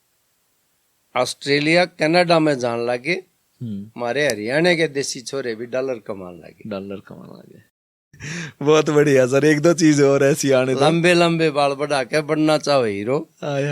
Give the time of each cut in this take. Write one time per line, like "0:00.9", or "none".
0:08.2

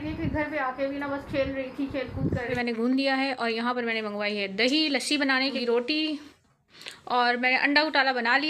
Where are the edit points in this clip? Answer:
0:02.5
0:05.6

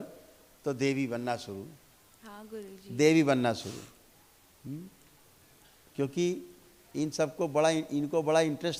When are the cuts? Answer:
none

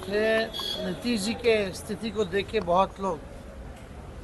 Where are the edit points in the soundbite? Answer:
none

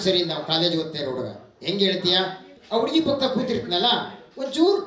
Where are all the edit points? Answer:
0:02.5

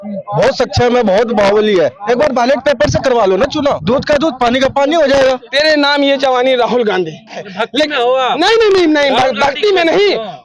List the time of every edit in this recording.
0:03.8
0:05.4
0:07.4

